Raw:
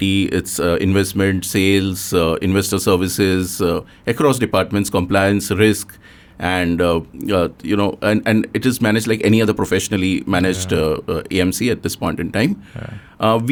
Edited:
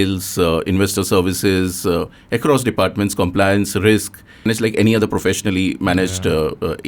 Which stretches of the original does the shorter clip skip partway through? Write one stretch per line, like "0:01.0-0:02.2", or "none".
0:06.2-0:08.9

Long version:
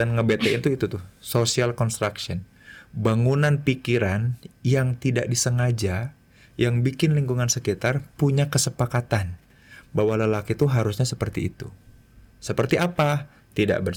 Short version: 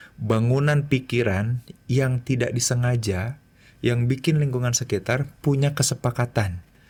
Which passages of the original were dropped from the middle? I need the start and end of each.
none

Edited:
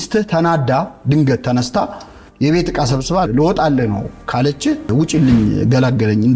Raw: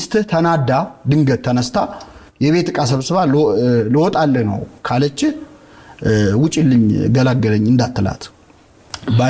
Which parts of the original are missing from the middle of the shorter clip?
0:03.3-0:03.8
0:05.5-0:06.3

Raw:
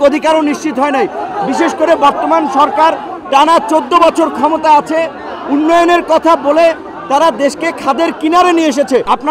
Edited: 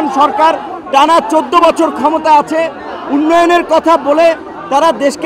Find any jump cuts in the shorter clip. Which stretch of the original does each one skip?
none

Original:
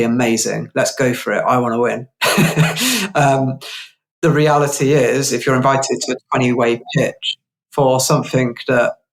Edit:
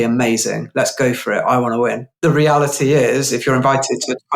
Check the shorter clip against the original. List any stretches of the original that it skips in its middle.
0:02.1-0:04.1

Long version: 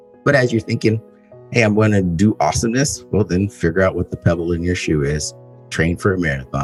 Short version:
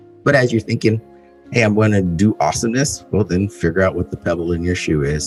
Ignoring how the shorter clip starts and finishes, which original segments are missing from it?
none

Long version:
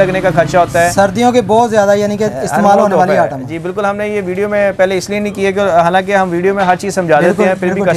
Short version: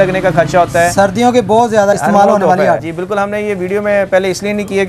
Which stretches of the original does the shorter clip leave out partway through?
0:01.9-0:02.5
0:03.4-0:03.5

